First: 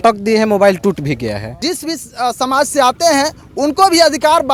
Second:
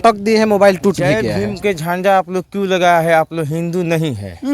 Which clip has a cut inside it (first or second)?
second